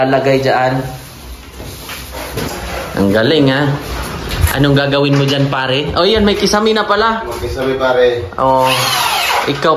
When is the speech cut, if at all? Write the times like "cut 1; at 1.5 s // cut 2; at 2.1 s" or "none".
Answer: cut 1; at 2.5 s